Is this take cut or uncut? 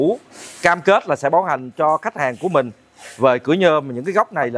uncut